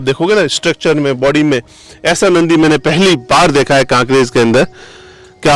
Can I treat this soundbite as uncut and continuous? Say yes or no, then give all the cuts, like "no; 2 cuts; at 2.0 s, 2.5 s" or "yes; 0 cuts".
yes; 0 cuts